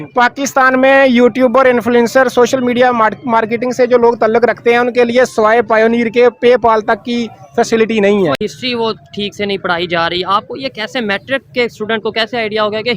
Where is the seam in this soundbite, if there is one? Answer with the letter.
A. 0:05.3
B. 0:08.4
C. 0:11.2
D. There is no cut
B